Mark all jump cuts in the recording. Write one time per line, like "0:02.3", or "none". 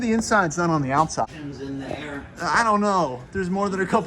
0:01.3